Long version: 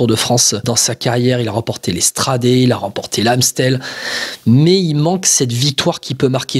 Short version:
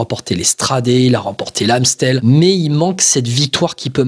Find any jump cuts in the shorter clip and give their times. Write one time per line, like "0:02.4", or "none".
0:02.2